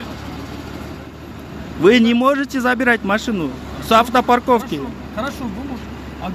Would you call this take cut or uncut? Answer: cut